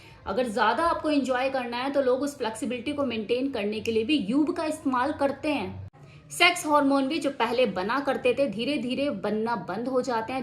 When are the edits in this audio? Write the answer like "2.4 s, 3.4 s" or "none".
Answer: 5.8 s